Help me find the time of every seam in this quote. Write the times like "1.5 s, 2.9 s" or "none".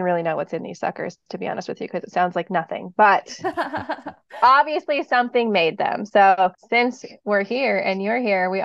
6.6 s